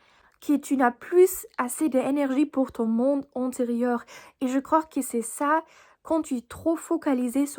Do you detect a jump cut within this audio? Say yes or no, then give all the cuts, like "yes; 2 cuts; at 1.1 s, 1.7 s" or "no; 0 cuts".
no; 0 cuts